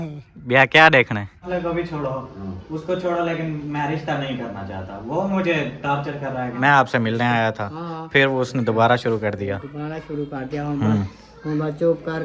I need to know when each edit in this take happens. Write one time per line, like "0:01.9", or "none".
0:01.5
0:06.5